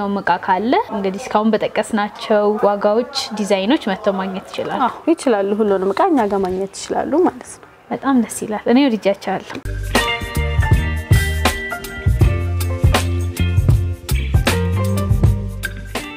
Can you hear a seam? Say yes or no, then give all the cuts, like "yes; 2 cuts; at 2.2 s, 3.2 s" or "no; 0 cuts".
no; 0 cuts